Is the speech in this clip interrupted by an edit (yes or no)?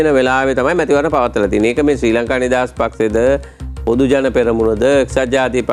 no